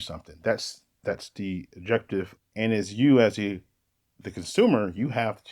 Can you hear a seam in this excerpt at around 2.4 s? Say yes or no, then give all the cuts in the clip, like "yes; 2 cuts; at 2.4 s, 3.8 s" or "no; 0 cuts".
yes; 1 cut; at 2.4 s